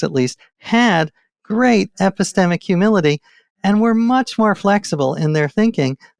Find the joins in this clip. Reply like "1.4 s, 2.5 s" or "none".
none